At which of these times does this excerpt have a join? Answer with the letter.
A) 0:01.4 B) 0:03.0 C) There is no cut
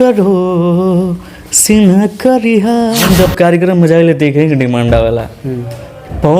B